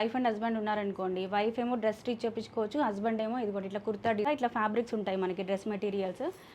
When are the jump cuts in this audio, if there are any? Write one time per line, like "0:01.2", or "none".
0:04.3